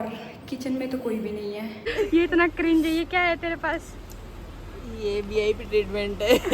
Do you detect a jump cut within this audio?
yes; 1 cut; at 1.9 s

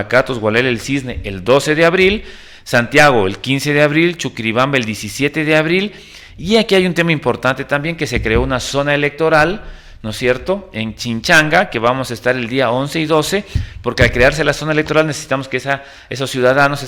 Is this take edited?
no; 0 cuts

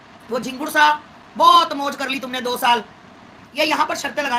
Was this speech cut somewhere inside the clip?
yes; 1 cut; at 3.4 s

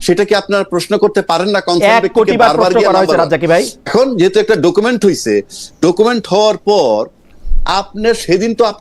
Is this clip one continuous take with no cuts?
no; 1 cut; at 3.8 s

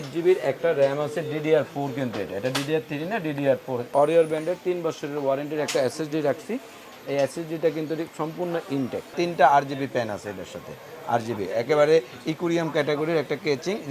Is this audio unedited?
no; 2 cuts; at 3.9 s, 9.1 s

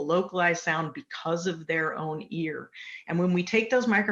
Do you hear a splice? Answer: no; 0 cuts

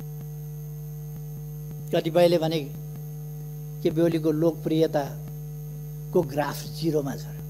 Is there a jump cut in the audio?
yes; 1 cut; at 1.7 s

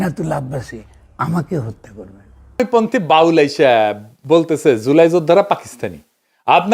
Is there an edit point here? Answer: yes; 1 cut; at 2.6 s

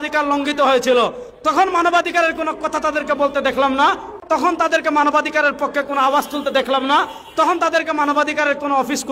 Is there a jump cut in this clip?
yes; 1 cut; at 4.2 s

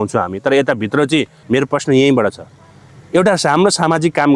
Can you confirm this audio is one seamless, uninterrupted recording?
no; 1 cut; at 1.4 s

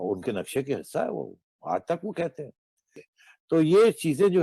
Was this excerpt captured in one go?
no; 1 cut; at 3.1 s

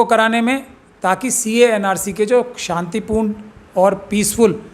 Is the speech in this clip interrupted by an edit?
no; 0 cuts

